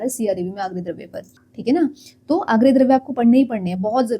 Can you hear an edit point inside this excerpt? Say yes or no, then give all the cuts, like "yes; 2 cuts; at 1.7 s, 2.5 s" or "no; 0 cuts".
yes; 1 cut; at 1.2 s